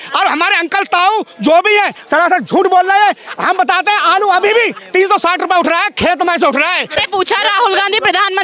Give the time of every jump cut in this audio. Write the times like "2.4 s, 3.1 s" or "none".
7.0 s